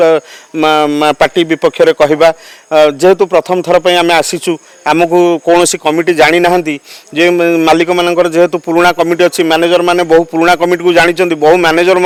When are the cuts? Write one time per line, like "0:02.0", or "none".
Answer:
none